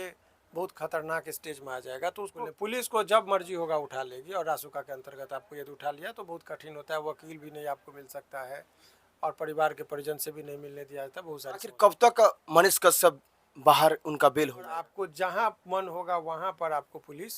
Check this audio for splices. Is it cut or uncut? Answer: cut